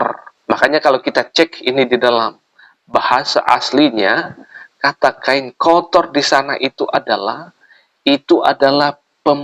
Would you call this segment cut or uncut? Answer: uncut